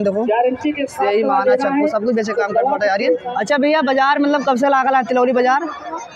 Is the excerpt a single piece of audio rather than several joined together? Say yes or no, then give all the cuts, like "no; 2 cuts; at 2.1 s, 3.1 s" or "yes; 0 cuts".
no; 1 cut; at 3.2 s